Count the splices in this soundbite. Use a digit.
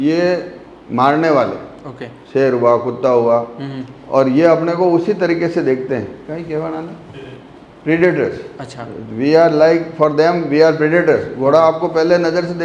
0